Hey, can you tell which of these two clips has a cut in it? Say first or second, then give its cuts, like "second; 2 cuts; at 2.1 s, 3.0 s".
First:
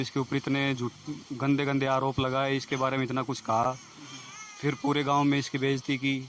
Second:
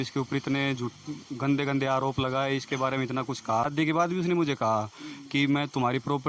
second; 1 cut; at 3.6 s